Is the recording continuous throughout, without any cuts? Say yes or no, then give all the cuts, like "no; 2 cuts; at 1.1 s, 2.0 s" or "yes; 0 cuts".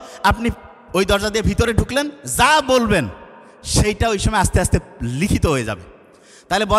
yes; 0 cuts